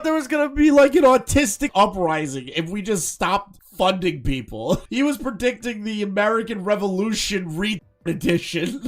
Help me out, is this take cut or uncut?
cut